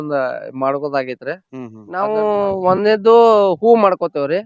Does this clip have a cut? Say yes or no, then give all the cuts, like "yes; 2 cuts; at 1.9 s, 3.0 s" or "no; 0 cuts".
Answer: yes; 1 cut; at 1.8 s